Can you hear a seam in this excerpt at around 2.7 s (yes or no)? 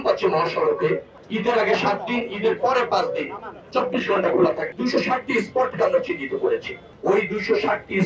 no